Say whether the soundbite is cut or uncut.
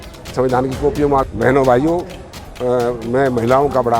cut